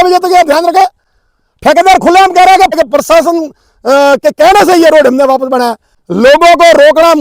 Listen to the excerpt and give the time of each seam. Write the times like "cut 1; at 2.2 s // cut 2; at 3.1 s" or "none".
cut 1; at 2.8 s // cut 2; at 6.0 s